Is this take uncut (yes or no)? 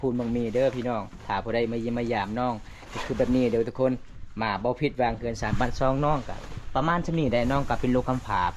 yes